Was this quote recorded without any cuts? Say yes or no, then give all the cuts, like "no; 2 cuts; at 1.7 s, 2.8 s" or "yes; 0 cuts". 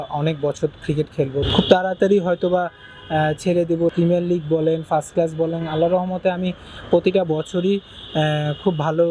no; 2 cuts; at 1.4 s, 3.9 s